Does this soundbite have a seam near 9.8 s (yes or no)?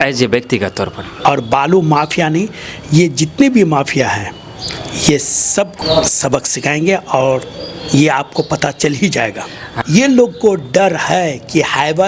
yes